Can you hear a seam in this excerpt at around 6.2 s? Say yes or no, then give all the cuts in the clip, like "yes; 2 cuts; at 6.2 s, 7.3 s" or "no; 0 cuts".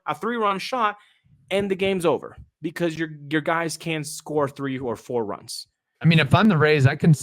yes; 1 cut; at 6.2 s